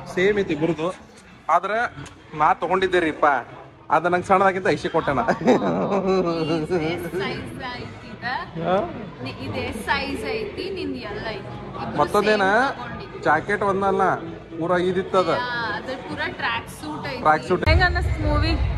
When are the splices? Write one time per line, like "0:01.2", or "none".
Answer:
0:17.6